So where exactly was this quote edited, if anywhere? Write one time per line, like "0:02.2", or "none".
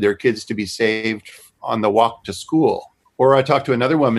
0:01.6
0:03.0